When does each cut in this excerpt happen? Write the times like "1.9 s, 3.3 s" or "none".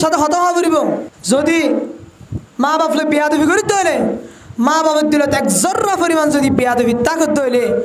1.1 s